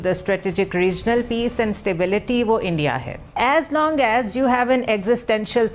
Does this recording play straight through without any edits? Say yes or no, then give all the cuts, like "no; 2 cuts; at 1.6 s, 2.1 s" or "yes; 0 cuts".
yes; 0 cuts